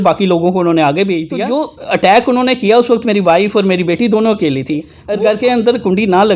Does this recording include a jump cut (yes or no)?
yes